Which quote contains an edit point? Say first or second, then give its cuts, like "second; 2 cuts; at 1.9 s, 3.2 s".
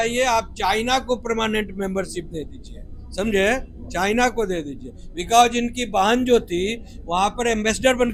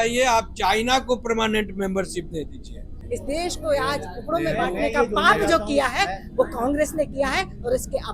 second; 1 cut; at 2.9 s